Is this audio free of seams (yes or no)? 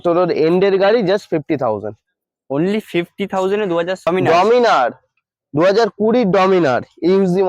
no